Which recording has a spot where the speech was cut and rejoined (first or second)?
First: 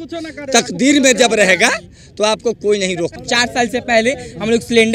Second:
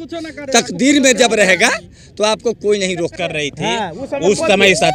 first